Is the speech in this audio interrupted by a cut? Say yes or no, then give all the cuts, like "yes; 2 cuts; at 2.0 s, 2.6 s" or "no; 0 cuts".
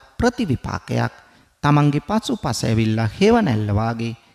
no; 0 cuts